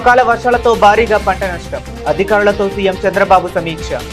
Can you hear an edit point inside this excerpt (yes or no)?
no